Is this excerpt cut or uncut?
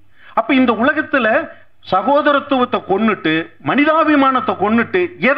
uncut